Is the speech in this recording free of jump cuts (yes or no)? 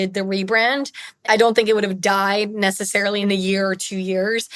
no